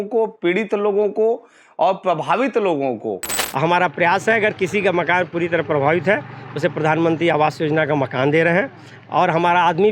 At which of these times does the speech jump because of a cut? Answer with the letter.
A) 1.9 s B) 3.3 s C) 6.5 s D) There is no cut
B